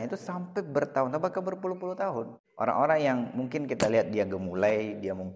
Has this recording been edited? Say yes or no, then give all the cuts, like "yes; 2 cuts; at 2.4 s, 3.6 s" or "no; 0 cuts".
yes; 1 cut; at 2.4 s